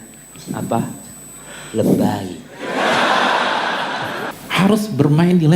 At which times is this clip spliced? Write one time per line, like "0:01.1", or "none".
0:04.3